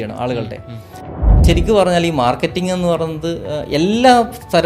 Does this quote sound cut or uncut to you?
cut